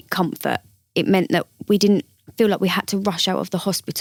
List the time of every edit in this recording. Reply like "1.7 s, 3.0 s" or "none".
none